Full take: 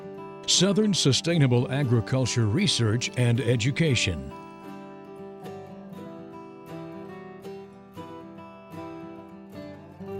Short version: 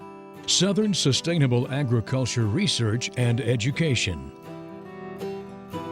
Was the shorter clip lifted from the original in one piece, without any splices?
no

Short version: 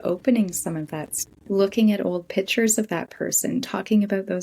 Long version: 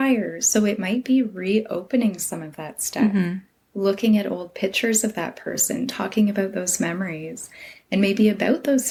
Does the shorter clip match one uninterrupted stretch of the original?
no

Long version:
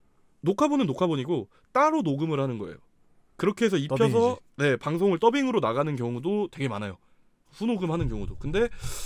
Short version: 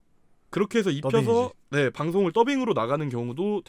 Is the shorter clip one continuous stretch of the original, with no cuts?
yes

